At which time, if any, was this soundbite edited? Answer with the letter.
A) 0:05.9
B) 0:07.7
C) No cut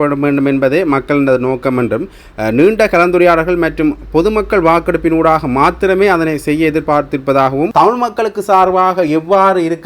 B